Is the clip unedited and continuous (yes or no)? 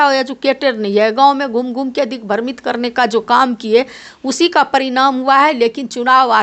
yes